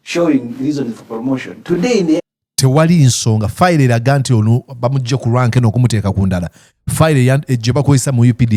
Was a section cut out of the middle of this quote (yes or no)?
no